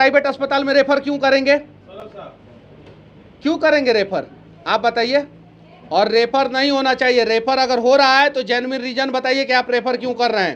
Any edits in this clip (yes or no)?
no